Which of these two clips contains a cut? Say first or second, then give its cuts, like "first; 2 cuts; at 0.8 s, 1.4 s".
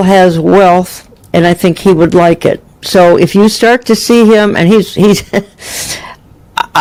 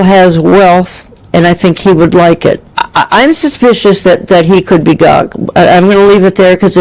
second; 1 cut; at 2.7 s